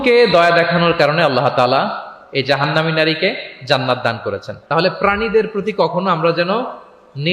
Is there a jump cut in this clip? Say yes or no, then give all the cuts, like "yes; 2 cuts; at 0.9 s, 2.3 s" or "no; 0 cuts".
yes; 1 cut; at 4.5 s